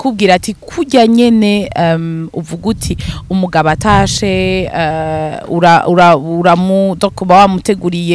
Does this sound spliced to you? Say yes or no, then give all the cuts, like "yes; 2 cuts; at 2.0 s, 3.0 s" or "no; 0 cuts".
no; 0 cuts